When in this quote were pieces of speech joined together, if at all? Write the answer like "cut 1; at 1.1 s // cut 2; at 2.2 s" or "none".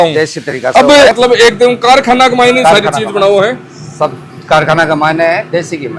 cut 1; at 1.1 s